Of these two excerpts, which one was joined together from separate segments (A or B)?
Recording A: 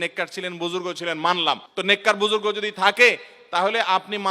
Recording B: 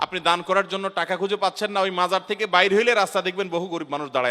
A